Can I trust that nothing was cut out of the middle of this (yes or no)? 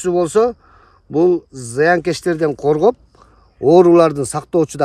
yes